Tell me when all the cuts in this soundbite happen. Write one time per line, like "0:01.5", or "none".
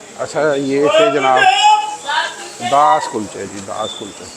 none